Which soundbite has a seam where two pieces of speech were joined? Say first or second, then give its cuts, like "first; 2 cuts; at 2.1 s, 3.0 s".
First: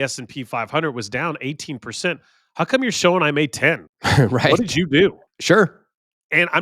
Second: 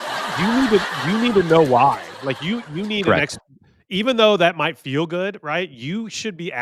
first; 2 cuts; at 3.9 s, 5.3 s